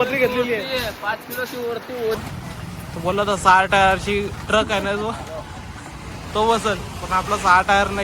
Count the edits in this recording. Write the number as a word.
one